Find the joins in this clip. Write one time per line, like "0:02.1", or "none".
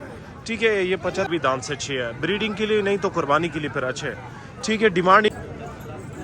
0:01.3
0:05.3